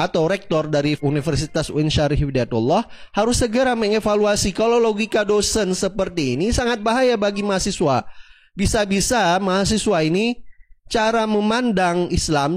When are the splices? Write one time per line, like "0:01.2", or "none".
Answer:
0:01.0